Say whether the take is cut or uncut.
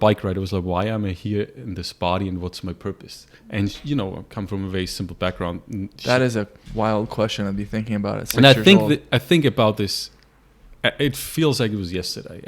uncut